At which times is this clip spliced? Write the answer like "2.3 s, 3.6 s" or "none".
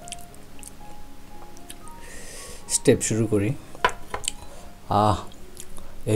none